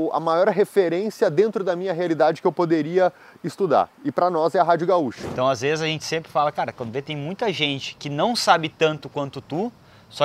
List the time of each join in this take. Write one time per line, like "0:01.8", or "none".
0:05.2